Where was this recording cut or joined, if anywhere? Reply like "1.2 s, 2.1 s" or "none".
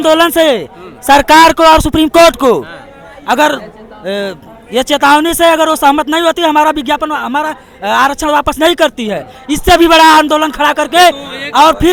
none